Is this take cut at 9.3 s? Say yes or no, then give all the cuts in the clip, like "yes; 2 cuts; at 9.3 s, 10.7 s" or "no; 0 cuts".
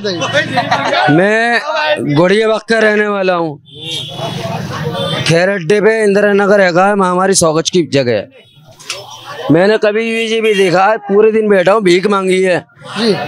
no; 0 cuts